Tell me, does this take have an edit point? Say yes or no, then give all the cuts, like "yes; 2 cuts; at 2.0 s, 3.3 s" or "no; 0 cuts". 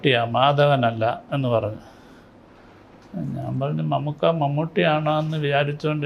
no; 0 cuts